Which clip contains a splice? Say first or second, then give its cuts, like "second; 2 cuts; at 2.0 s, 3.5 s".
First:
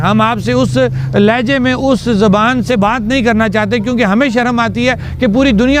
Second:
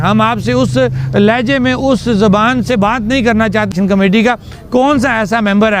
second; 1 cut; at 3.7 s